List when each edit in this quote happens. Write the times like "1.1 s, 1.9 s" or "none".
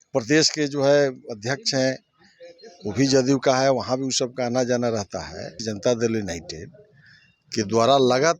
5.6 s